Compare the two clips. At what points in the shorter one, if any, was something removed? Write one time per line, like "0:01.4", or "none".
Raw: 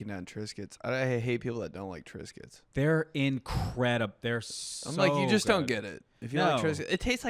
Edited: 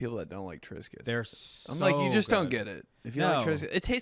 0:01.0